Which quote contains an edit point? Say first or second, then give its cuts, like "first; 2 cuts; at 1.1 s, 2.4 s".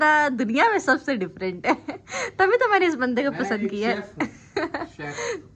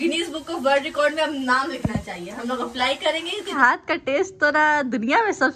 second; 1 cut; at 3.6 s